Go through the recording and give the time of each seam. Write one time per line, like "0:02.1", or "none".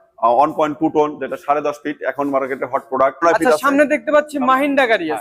0:03.2